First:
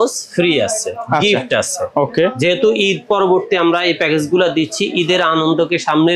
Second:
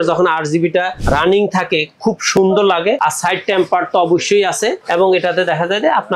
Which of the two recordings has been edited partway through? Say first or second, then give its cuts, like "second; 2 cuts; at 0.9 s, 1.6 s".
second; 3 cuts; at 1.0 s, 3.0 s, 4.8 s